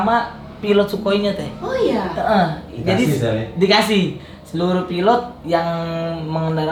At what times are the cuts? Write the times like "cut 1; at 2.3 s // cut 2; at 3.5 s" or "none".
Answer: none